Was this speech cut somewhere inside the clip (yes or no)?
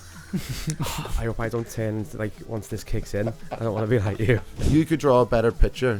yes